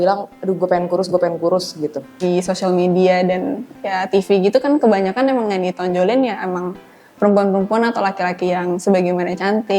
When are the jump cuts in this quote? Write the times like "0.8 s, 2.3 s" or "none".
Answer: 2.2 s